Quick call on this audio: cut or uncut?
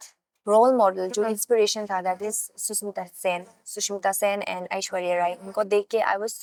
uncut